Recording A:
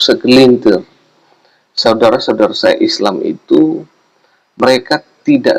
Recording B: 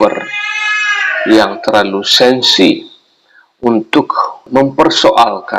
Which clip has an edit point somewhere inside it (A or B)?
B